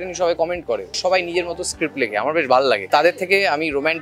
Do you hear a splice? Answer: yes; 2 cuts; at 0.9 s, 2.9 s

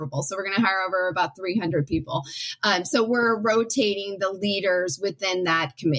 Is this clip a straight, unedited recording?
yes; 0 cuts

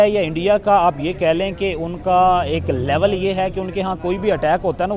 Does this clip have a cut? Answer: no; 0 cuts

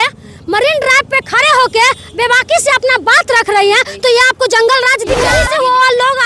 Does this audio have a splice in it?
yes; 1 cut; at 5.3 s

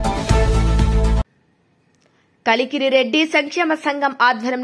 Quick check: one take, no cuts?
no; 1 cut; at 1.3 s

